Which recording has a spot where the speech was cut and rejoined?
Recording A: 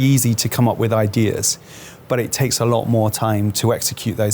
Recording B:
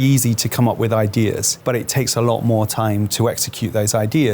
B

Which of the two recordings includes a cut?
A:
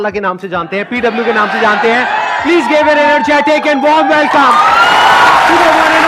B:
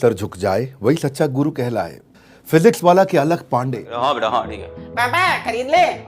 B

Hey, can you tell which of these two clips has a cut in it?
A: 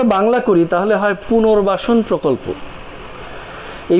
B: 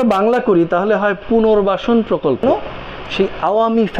B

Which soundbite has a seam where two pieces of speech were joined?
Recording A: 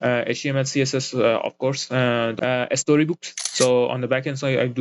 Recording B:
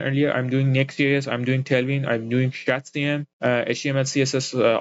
A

